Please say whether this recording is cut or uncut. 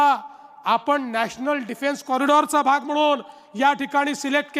uncut